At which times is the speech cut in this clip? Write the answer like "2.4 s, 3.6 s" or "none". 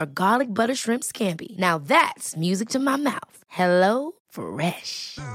none